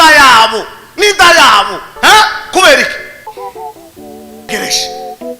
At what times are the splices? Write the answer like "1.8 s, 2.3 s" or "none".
3.2 s, 4.5 s